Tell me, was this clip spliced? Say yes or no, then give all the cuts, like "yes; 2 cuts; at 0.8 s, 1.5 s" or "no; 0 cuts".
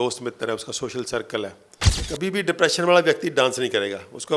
yes; 1 cut; at 2.0 s